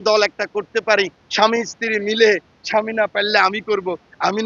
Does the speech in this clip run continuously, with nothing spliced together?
yes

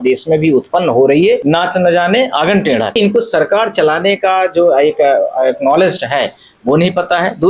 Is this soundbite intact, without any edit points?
no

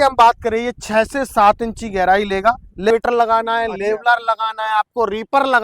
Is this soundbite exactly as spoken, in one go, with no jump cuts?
no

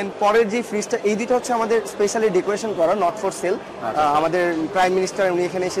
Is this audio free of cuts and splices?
yes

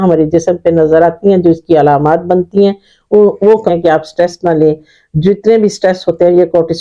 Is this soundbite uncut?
no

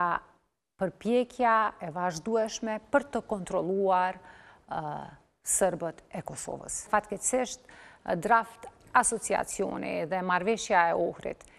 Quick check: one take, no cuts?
no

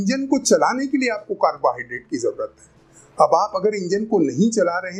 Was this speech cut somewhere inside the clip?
no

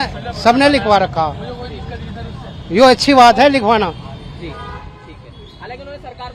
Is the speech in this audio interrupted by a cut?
no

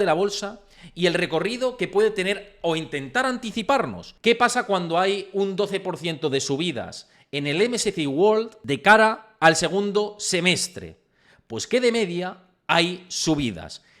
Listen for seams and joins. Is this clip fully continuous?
no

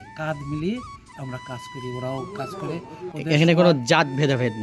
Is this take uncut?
no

